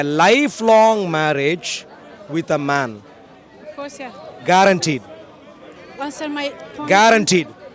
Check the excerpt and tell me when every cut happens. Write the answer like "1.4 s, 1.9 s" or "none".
none